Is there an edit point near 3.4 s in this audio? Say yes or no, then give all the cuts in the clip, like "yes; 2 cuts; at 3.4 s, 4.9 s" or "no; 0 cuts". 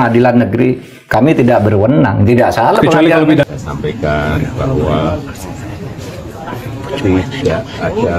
yes; 1 cut; at 3.4 s